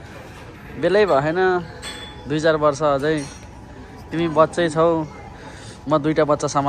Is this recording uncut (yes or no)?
yes